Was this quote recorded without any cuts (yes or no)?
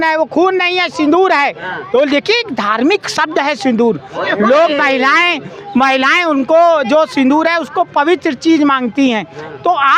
yes